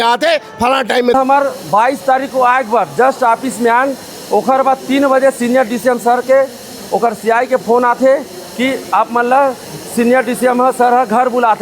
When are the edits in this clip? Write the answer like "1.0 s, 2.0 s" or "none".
1.1 s